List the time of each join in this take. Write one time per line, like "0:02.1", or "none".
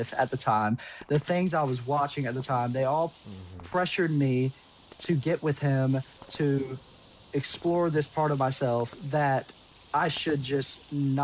none